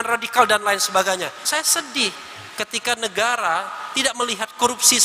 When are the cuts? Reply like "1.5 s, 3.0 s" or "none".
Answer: 1.4 s